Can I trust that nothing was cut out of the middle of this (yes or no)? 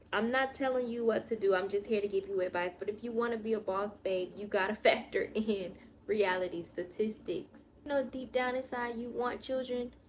no